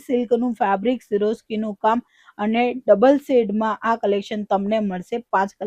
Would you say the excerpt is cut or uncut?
uncut